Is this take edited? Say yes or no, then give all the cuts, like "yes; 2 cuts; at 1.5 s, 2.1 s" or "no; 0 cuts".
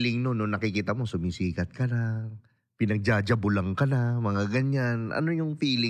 no; 0 cuts